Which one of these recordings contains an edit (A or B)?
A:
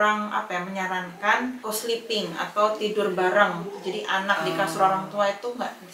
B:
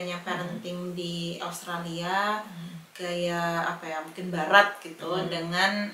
A